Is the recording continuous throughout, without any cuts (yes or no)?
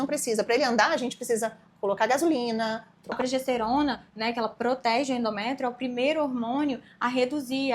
no